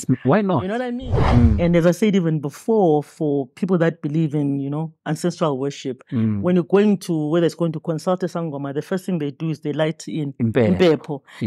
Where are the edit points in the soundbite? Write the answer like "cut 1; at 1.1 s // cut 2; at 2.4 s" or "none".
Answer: cut 1; at 1.0 s